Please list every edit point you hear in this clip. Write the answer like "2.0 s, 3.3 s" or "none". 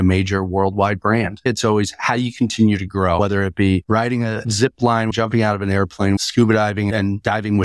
1.5 s, 3.2 s, 5.1 s, 6.2 s